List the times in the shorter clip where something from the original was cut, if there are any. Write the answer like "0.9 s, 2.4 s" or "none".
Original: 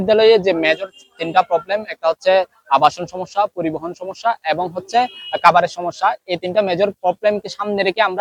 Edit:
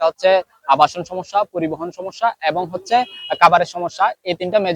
none